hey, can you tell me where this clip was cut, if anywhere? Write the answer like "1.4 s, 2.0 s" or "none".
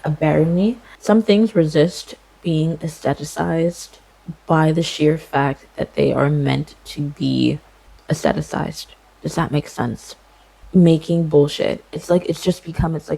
0.9 s, 10.5 s